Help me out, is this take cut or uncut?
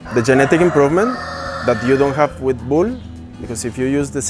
uncut